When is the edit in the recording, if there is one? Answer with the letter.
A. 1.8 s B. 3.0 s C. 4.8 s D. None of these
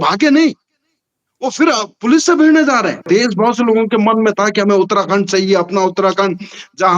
B